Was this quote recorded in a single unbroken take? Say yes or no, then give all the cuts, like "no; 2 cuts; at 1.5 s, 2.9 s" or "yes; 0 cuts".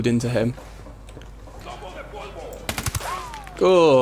no; 1 cut; at 1.9 s